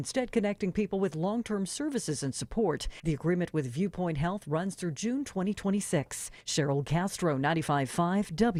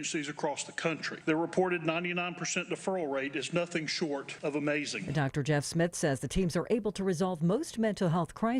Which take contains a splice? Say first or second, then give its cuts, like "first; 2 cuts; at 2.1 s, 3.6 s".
second; 2 cuts; at 1.1 s, 4.3 s